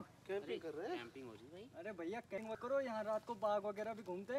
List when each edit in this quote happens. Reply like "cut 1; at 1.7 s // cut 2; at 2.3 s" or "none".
cut 1; at 2.6 s